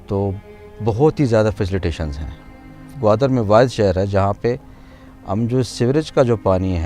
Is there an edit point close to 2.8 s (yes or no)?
yes